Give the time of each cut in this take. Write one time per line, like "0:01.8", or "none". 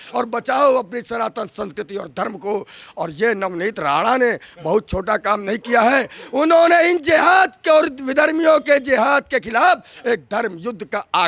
none

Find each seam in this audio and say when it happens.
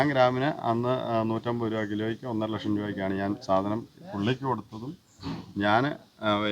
none

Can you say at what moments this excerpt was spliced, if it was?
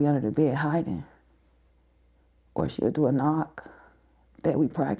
none

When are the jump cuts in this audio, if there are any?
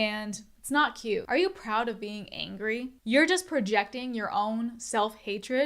0:03.0

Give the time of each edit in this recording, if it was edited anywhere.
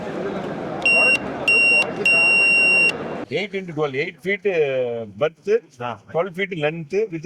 0:03.2

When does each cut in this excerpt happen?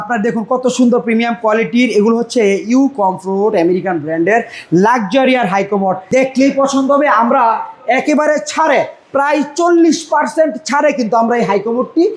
0:06.0

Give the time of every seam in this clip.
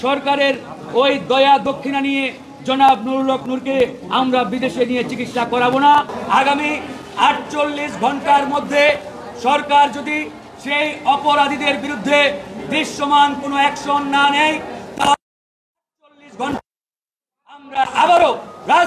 0:06.2

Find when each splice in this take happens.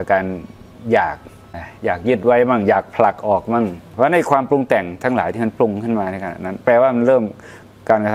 0:01.7
0:03.8

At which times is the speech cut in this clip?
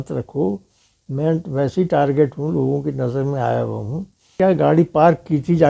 0:04.4

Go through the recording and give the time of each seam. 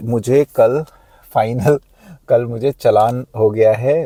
none

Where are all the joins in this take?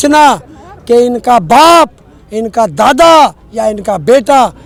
none

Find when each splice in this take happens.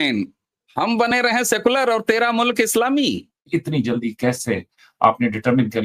0:03.4

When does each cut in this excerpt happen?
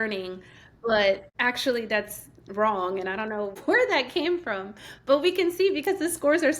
0:01.3
0:03.6

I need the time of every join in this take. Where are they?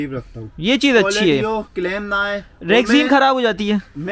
none

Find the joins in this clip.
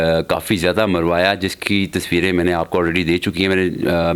none

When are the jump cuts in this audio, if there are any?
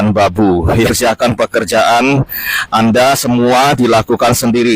0:00.9

